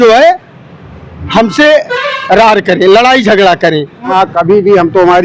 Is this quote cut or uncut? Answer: cut